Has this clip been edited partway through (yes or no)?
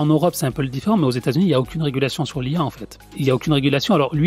yes